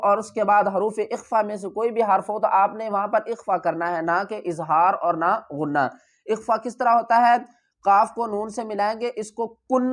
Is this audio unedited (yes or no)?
yes